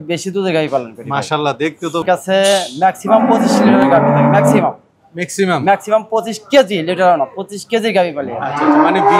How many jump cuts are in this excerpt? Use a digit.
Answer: 1